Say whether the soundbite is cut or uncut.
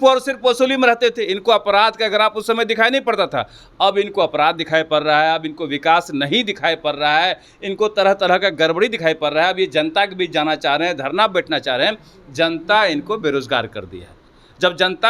uncut